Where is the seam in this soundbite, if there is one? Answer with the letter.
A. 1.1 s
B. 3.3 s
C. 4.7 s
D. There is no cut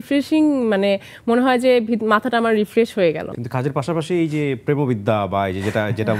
B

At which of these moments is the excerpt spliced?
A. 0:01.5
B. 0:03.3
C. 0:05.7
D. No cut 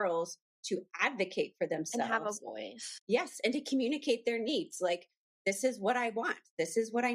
D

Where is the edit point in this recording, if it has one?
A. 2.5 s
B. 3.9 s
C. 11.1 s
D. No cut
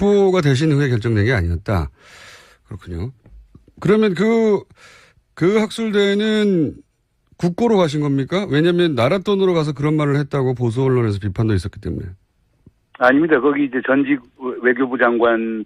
B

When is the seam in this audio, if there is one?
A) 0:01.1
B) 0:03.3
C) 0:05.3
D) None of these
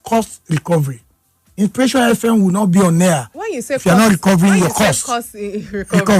D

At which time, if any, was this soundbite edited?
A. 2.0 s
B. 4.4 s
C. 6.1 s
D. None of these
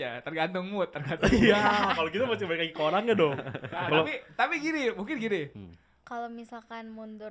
C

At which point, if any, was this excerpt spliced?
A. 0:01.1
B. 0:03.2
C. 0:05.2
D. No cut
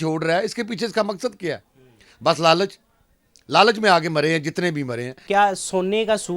C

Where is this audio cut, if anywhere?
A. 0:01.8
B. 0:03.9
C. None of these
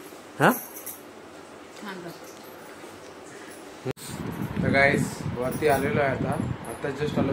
B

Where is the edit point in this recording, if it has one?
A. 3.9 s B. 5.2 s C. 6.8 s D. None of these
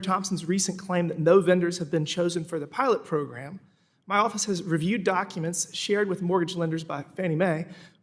D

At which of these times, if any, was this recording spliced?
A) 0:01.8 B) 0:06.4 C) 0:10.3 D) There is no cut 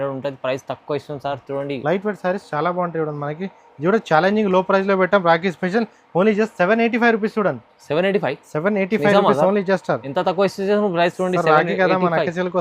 A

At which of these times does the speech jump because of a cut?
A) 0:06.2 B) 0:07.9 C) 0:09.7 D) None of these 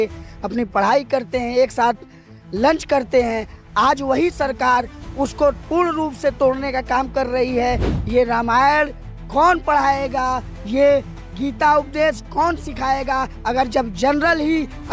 B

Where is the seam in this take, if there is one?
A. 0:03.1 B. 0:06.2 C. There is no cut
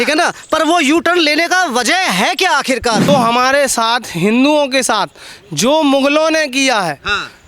A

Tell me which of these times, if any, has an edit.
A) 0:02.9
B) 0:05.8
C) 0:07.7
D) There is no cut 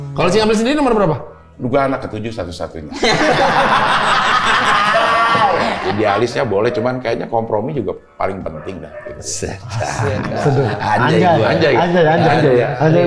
B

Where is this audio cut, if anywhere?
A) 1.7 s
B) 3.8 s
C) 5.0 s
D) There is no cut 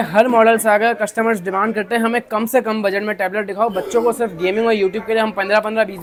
D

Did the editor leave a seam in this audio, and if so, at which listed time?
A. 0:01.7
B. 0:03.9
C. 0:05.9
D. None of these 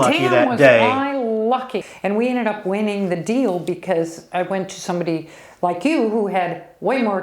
A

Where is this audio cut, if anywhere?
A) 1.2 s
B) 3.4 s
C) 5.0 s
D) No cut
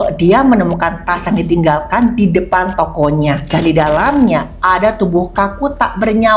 B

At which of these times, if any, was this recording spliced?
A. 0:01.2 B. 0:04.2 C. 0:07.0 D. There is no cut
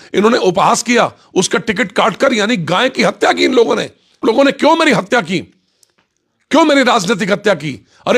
B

